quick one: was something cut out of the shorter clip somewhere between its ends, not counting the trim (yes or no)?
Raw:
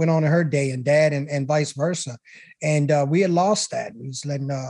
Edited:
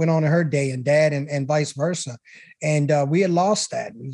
no